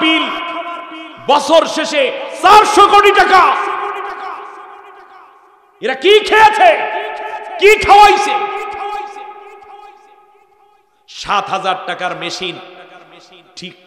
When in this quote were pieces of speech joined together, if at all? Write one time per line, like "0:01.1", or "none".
none